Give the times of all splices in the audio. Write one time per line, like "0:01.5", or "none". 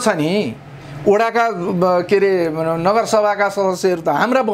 none